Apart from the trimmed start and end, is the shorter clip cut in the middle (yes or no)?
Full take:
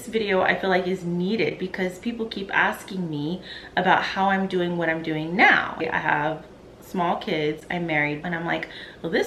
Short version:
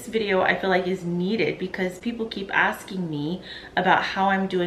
no